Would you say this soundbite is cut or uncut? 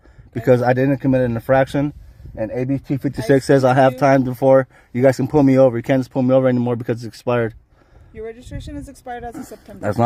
uncut